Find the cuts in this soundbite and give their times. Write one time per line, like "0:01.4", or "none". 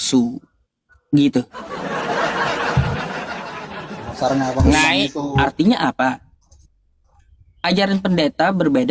0:05.2

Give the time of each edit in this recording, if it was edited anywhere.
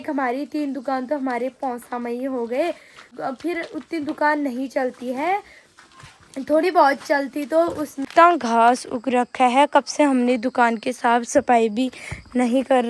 0:03.1
0:08.1

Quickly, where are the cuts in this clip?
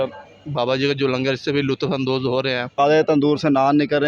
0:02.8

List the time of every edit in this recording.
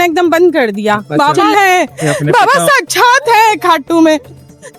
0:01.1

